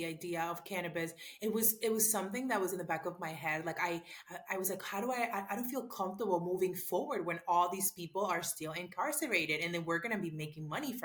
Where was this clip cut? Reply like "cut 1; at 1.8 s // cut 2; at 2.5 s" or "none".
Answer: none